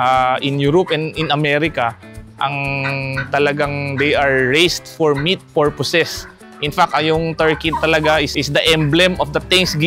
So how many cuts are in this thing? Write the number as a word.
zero